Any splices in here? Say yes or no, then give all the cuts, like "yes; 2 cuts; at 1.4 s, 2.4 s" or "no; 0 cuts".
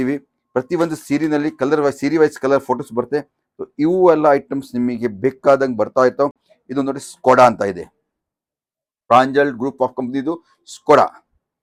no; 0 cuts